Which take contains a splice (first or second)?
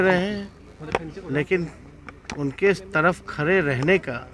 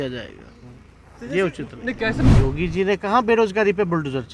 second